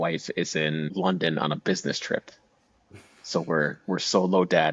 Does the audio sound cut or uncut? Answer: cut